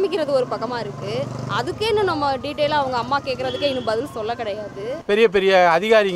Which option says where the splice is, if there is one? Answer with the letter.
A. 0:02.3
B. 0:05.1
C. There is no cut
B